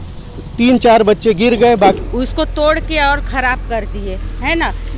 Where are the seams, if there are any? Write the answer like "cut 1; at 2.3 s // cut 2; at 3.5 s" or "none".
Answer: cut 1; at 2.0 s